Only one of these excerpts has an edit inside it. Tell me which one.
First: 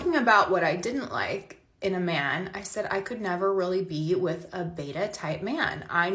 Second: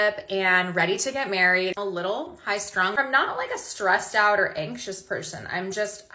second; 1 cut; at 1.8 s

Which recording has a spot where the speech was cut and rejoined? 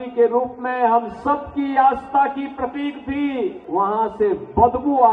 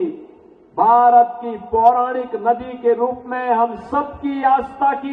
first; 1 cut; at 3.6 s

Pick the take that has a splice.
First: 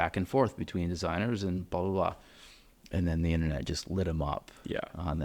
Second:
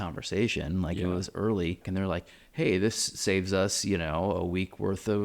second; 1 cut; at 1.9 s

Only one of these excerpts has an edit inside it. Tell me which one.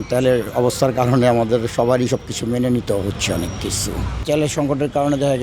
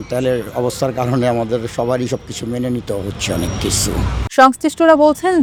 first; 1 cut; at 4.2 s

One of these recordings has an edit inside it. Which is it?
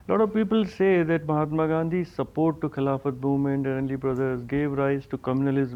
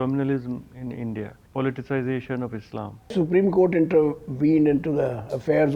second; 2 cuts; at 1.4 s, 3.1 s

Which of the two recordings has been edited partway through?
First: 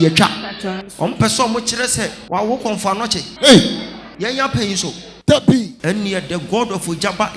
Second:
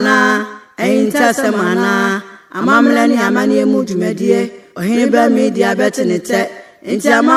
first; 5 cuts; at 0.9 s, 2.2 s, 3.2 s, 4.0 s, 5.7 s

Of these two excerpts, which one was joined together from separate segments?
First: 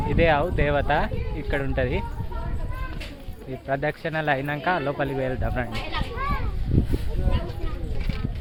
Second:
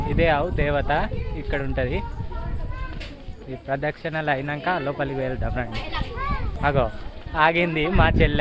second; 1 cut; at 6.6 s

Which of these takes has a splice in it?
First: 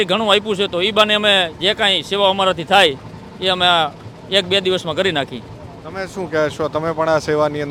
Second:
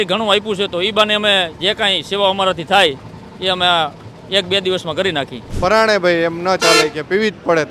second; 1 cut; at 5.4 s

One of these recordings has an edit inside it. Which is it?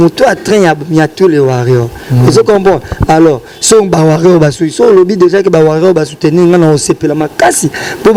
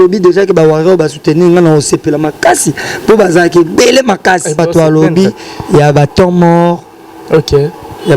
second; 1 cut; at 4.6 s

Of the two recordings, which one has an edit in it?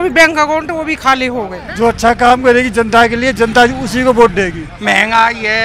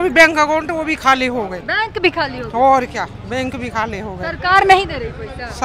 first; 2 cuts; at 1.6 s, 4.7 s

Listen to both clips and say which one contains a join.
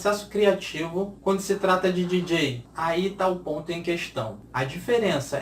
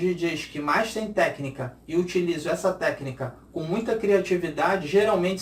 first; 3 cuts; at 1.1 s, 2.7 s, 4.4 s

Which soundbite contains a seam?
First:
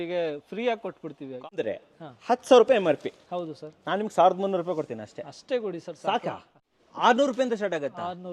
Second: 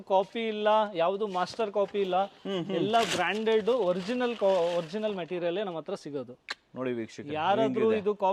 first; 2 cuts; at 1.4 s, 6.5 s

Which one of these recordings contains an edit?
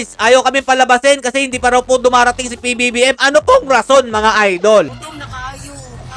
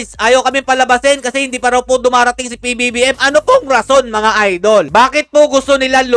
first; 1 cut; at 4.9 s

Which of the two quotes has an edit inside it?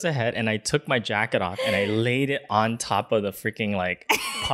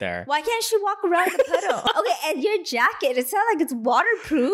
second; 1 cut; at 1.8 s

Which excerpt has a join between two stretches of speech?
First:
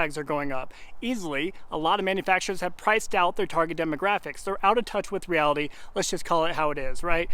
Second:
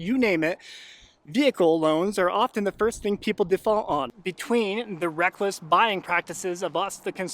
second; 1 cut; at 4.1 s

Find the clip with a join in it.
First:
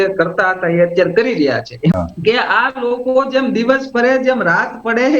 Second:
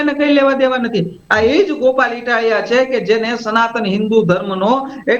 first; 1 cut; at 2.0 s

